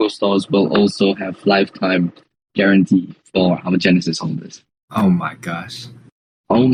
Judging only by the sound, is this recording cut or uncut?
uncut